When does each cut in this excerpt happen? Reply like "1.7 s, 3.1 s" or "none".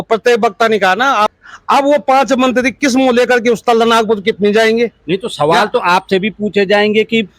1.3 s

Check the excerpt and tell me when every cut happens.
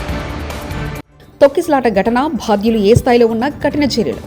none

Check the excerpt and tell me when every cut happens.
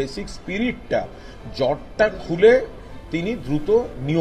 none

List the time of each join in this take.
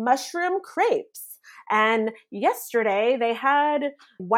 none

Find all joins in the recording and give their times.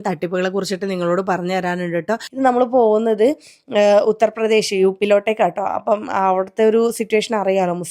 2.3 s

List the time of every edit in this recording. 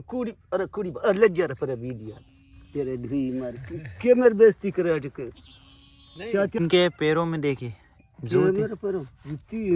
6.6 s

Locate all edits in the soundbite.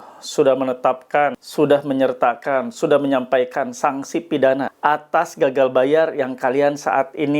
1.4 s, 4.7 s

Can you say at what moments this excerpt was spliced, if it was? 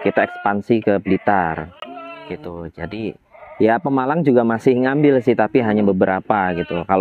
none

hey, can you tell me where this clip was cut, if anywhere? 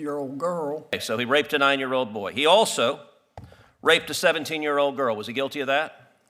1.0 s

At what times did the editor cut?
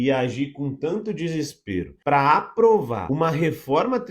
1.9 s, 3.0 s

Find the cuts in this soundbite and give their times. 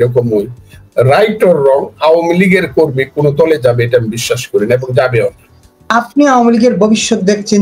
5.8 s

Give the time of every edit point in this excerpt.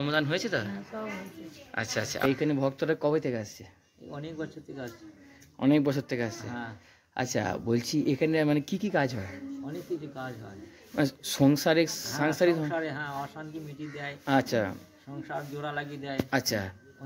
2.2 s

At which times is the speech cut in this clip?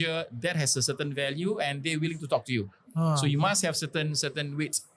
none

